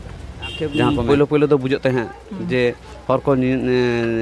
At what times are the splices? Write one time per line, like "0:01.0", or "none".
0:01.0